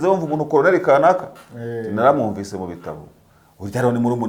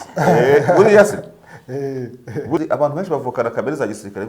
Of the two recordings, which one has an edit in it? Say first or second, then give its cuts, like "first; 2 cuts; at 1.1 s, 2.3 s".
second; 1 cut; at 2.6 s